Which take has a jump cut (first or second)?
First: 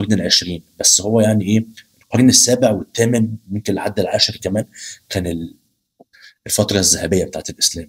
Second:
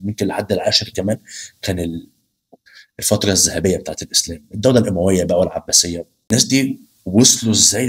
second